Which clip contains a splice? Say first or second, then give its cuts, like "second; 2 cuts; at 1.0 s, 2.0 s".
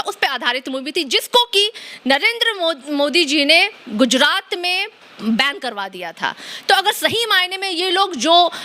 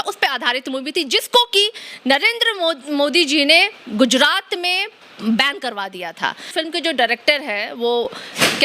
second; 1 cut; at 6.5 s